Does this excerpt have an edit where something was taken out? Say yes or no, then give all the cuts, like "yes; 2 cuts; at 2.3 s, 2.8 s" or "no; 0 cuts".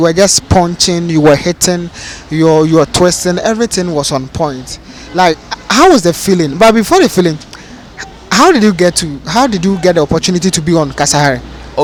no; 0 cuts